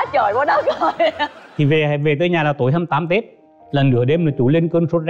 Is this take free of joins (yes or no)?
no